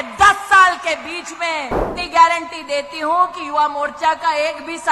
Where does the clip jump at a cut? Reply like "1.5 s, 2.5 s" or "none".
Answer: 1.9 s